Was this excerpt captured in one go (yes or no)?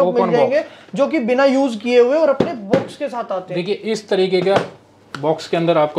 yes